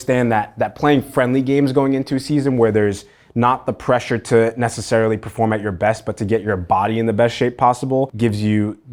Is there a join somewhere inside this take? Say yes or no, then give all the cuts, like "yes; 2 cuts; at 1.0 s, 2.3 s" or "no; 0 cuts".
no; 0 cuts